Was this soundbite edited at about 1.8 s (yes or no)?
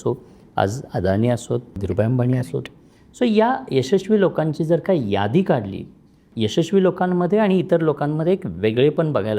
yes